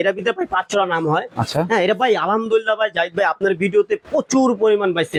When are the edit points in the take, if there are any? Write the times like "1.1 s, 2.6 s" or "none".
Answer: none